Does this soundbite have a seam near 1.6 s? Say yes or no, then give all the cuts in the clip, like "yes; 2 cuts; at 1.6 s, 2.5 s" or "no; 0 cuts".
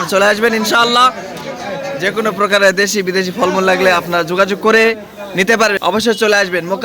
no; 1 cut; at 5.8 s